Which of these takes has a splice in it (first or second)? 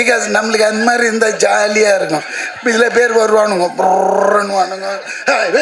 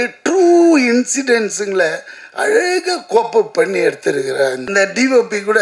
second